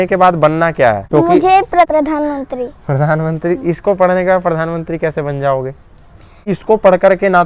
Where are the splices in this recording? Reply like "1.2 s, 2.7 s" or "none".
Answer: 1.0 s, 1.9 s, 6.4 s